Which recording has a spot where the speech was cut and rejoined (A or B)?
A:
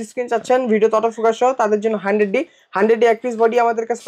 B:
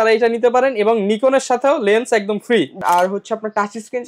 B